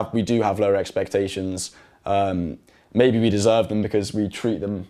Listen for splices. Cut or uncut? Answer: uncut